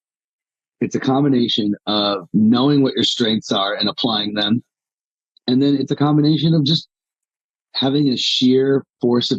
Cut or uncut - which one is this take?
uncut